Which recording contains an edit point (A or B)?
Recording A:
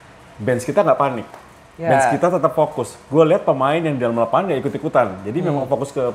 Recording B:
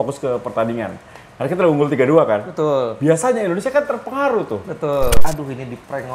B